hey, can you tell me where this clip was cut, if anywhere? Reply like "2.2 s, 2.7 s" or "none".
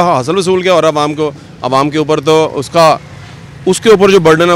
none